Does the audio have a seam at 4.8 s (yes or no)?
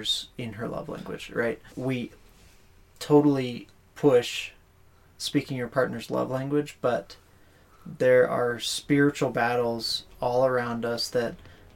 no